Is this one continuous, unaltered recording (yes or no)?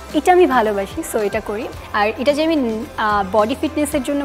no